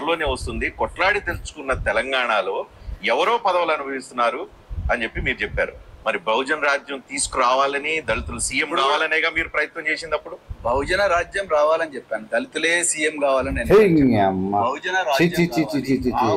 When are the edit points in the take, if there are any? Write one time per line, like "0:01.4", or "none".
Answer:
none